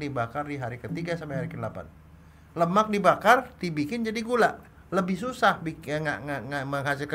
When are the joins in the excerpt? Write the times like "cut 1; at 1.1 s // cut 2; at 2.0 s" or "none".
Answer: none

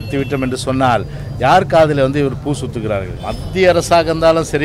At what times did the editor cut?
cut 1; at 3.1 s

